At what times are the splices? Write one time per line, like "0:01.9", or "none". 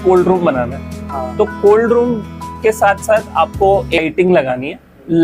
0:04.0